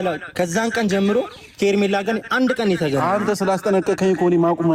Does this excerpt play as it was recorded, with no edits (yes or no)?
yes